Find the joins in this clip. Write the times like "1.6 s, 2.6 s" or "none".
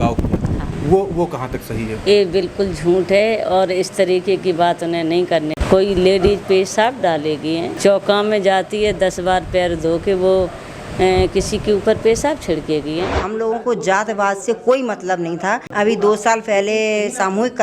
5.6 s, 7.7 s, 13.2 s, 15.7 s